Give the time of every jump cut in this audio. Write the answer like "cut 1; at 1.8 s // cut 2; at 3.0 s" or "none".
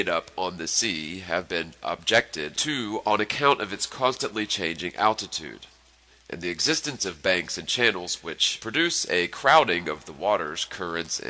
none